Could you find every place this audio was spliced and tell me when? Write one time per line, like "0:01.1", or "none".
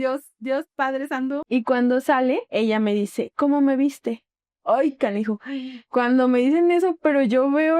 0:01.4